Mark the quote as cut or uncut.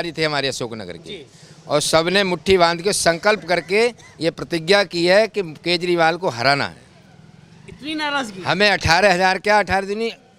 uncut